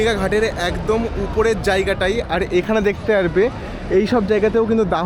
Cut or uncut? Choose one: uncut